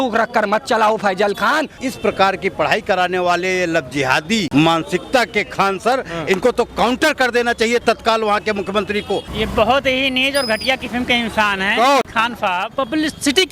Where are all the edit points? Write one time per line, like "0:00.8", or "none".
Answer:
0:01.8
0:04.5
0:07.8
0:09.3
0:12.7